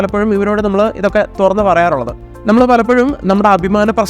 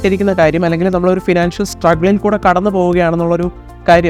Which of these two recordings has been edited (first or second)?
first